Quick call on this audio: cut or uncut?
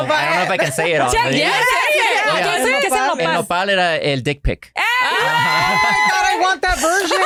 uncut